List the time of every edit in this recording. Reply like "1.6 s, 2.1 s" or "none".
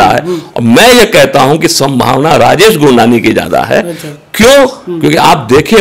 none